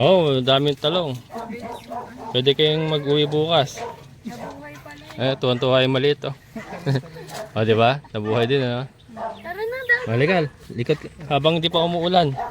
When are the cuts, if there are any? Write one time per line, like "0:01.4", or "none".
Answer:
none

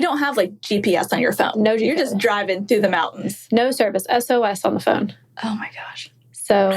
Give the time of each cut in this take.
none

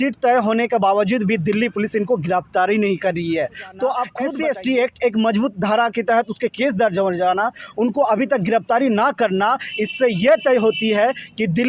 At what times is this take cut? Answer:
0:04.2

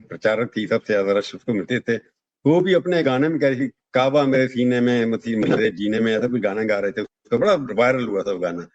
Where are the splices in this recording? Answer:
none

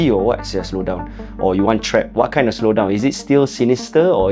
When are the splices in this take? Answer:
none

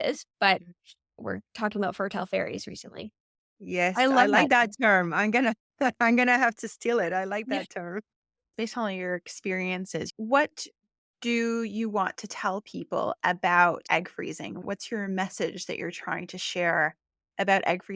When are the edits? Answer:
0:08.5
0:13.8

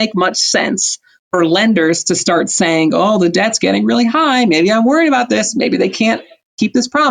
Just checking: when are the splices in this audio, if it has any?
none

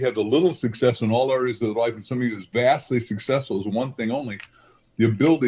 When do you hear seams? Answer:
none

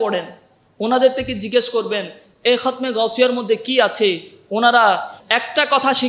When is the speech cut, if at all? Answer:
0:05.2

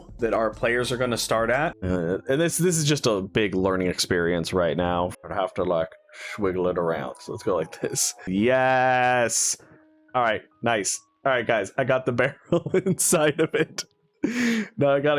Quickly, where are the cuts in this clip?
0:01.8
0:05.1
0:08.3

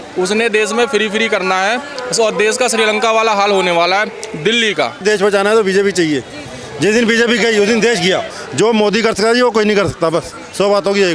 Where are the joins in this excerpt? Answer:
0:05.0
0:08.3

